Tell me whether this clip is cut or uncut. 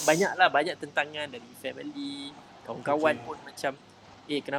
uncut